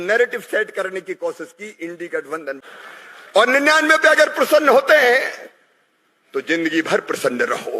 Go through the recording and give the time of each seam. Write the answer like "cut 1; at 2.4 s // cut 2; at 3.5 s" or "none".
cut 1; at 2.6 s

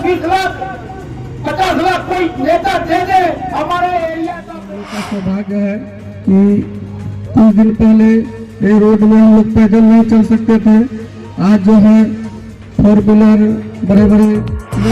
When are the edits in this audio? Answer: cut 1; at 4.9 s

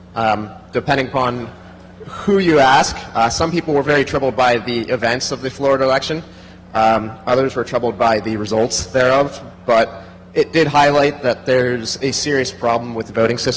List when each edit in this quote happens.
cut 1; at 3.4 s

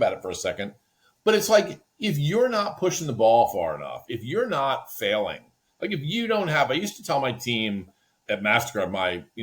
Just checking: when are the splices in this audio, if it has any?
cut 1; at 8.1 s

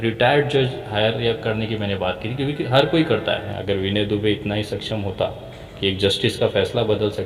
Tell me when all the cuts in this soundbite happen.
cut 1; at 3.5 s

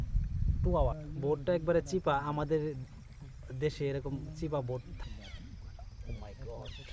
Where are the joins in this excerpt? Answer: cut 1; at 1.0 s // cut 2; at 4.9 s

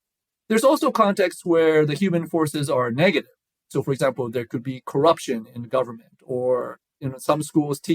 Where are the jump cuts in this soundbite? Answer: cut 1; at 6.9 s

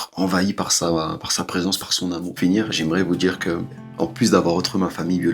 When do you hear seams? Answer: cut 1; at 2.3 s

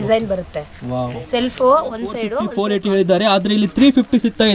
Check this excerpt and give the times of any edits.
cut 1; at 2.4 s

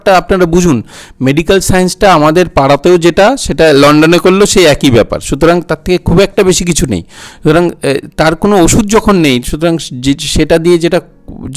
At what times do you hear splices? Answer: none

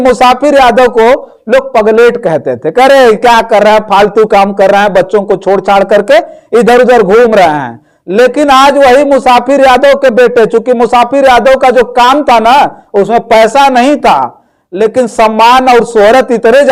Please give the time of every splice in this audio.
none

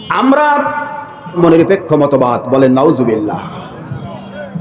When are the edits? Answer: cut 1; at 1.4 s

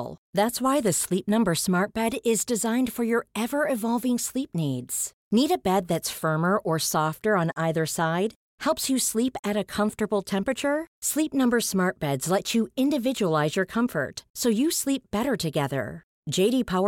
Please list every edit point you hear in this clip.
none

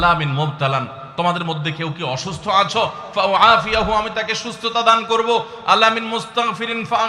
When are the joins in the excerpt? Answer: none

